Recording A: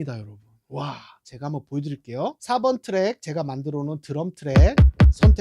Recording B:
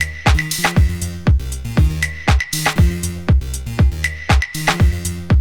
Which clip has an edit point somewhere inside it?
A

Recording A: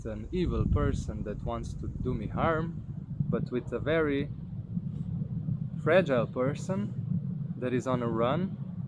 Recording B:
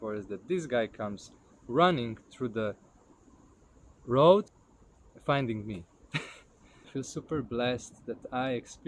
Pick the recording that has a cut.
B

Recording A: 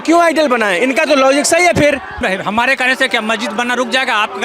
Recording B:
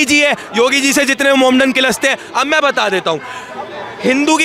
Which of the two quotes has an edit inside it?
A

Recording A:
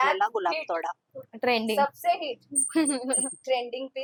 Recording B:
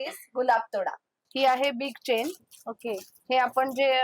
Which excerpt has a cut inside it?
B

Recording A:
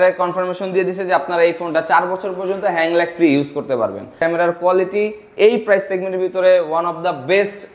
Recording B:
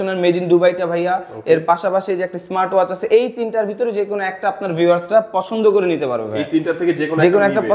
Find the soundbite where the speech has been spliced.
A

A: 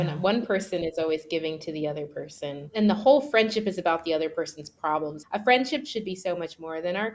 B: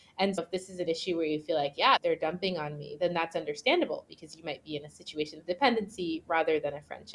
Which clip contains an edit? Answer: A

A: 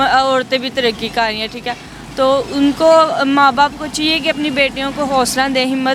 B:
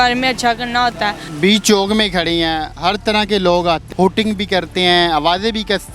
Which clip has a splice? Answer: B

